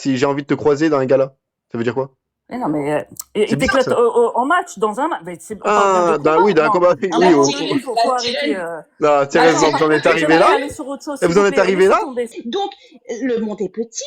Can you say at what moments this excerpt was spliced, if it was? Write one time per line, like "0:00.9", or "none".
0:12.2